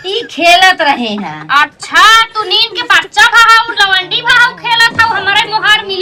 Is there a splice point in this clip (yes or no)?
no